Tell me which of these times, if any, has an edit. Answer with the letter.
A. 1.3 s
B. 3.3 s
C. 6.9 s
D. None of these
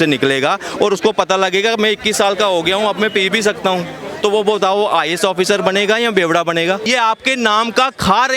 C